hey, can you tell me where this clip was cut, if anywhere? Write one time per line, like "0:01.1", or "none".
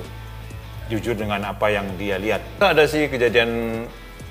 0:02.6